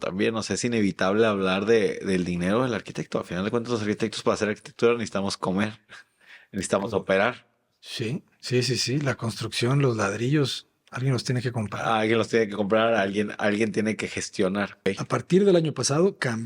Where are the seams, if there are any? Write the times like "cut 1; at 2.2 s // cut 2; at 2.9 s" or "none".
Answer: cut 1; at 14.9 s

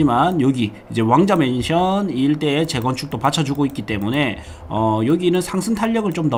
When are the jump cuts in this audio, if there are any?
none

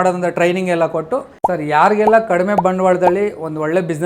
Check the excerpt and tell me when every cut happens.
cut 1; at 1.3 s

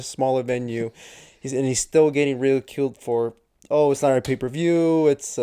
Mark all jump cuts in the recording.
none

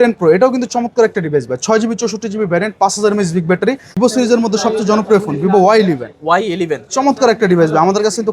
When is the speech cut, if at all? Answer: cut 1; at 3.9 s

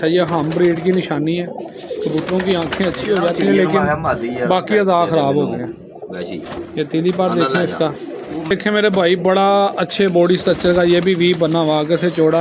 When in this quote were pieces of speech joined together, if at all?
cut 1; at 8.5 s

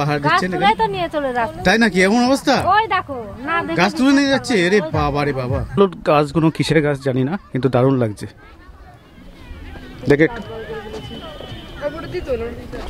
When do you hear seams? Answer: cut 1; at 5.8 s

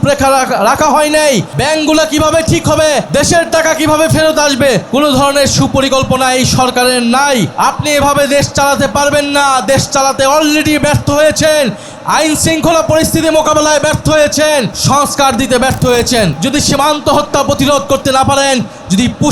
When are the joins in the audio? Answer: cut 1; at 1.5 s // cut 2; at 3.1 s // cut 3; at 4.8 s // cut 4; at 7.5 s // cut 5; at 14.8 s // cut 6; at 16.4 s

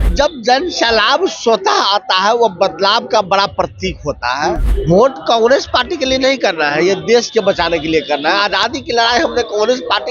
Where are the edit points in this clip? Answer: cut 1; at 4.7 s

